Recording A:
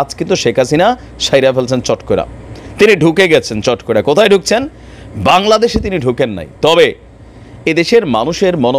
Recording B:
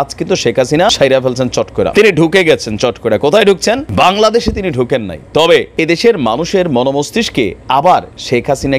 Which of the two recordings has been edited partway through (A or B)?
B